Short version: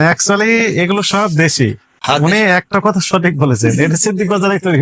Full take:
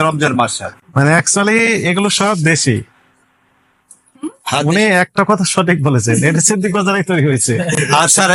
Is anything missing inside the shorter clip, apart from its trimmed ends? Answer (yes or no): yes